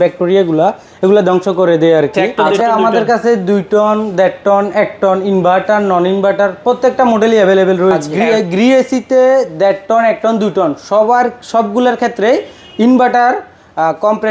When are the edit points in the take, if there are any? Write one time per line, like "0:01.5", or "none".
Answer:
0:02.4
0:08.1